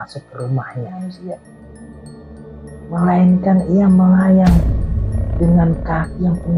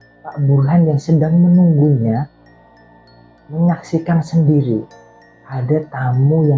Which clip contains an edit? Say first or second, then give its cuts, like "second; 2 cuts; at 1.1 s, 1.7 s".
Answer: first; 1 cut; at 0.9 s